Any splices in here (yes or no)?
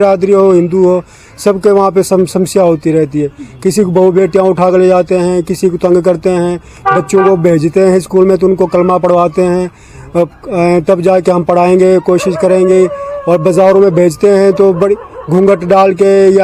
no